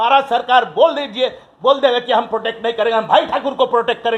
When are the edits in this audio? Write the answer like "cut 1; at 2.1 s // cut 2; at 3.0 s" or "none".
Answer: none